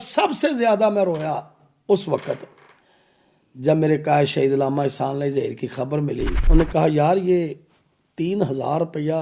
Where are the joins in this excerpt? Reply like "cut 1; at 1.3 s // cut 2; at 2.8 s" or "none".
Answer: cut 1; at 6.4 s

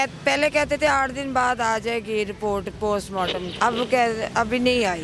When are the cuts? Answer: cut 1; at 3.5 s

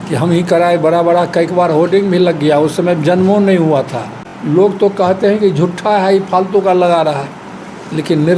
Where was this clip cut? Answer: cut 1; at 4.3 s

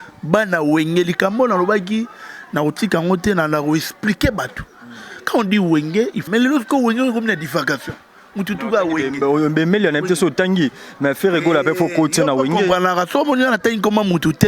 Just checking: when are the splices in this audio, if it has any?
cut 1; at 6.2 s

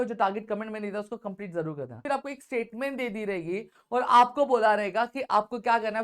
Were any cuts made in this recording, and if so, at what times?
cut 1; at 2.0 s

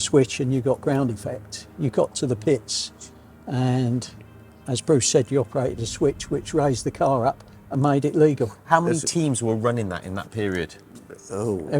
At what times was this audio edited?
none

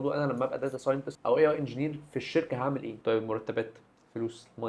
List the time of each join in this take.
cut 1; at 1.1 s // cut 2; at 3.0 s

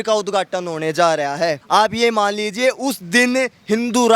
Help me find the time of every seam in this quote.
cut 1; at 1.6 s

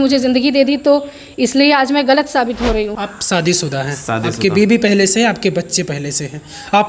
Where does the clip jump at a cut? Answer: cut 1; at 3.0 s

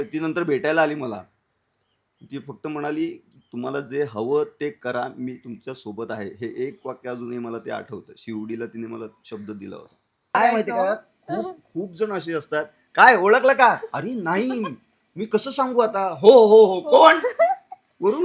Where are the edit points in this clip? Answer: cut 1; at 10.3 s

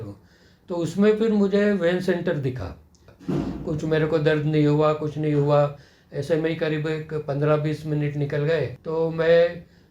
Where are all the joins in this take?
cut 1; at 3.1 s // cut 2; at 8.8 s

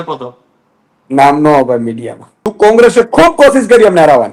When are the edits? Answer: cut 1; at 2.5 s

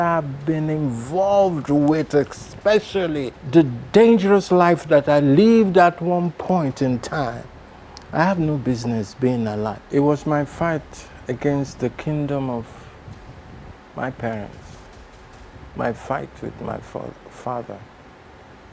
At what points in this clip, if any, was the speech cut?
cut 1; at 9.8 s

